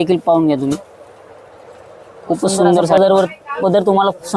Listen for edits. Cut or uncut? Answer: cut